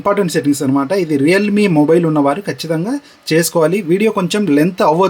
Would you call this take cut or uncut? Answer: uncut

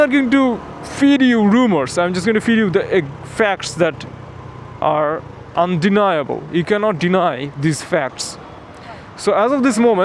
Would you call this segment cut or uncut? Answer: uncut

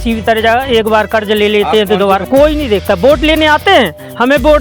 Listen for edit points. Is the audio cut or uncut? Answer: cut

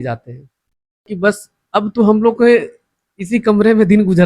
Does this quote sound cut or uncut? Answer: cut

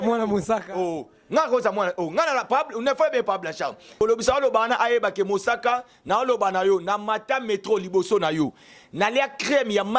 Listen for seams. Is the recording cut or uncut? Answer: cut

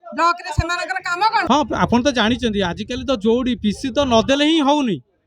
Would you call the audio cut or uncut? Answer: cut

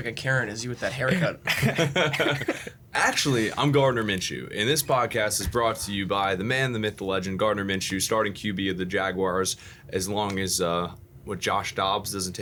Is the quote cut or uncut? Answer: uncut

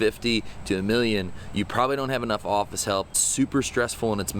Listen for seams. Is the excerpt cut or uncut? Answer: cut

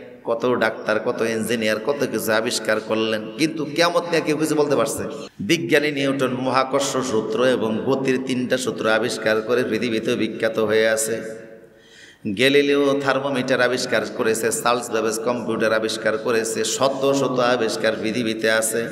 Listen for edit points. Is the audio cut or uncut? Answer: cut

